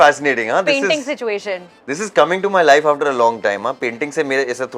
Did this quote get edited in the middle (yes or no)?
no